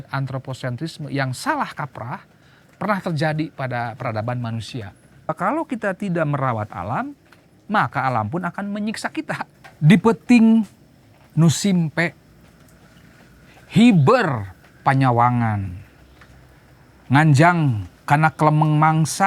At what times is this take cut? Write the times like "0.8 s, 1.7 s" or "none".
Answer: 5.3 s, 9.6 s